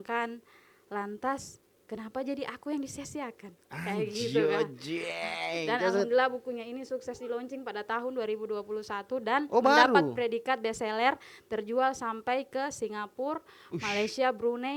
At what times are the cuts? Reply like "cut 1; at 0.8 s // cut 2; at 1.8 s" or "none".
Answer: none